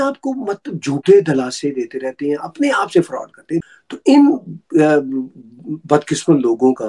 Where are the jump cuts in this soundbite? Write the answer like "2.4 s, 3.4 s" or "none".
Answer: 3.7 s